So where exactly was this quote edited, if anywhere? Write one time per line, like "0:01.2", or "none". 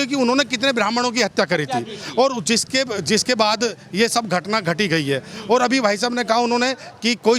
none